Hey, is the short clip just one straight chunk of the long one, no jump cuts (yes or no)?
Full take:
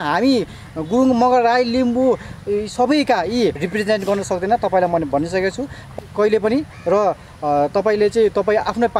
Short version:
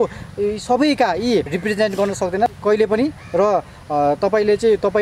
no